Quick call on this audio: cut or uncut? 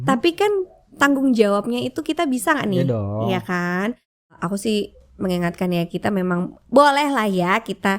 cut